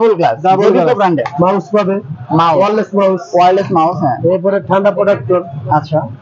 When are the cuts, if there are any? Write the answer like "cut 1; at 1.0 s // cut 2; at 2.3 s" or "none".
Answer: cut 1; at 1.3 s